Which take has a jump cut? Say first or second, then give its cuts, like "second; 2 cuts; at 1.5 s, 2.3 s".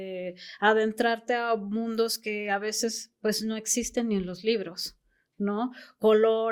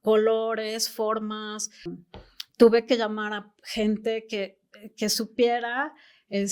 second; 1 cut; at 1.9 s